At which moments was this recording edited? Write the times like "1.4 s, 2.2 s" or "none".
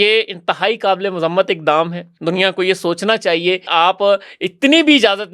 2.1 s, 3.7 s